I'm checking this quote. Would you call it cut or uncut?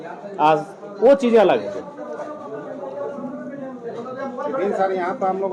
uncut